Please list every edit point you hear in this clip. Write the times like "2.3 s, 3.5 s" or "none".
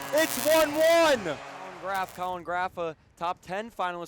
1.8 s